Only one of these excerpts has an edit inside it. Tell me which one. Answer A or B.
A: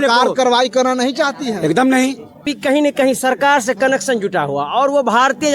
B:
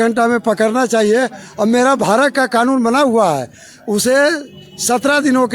A